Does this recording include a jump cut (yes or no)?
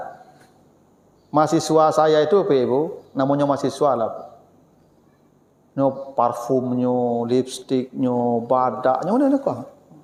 no